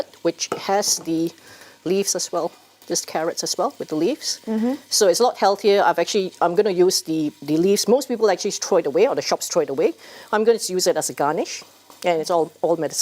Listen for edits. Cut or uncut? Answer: uncut